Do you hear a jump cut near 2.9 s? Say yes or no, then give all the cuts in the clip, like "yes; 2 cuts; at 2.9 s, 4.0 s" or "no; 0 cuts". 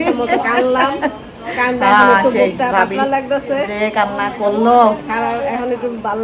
no; 0 cuts